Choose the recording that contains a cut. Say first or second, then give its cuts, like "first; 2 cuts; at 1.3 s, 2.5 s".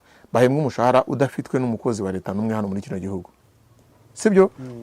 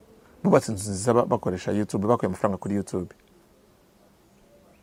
first; 1 cut; at 3.4 s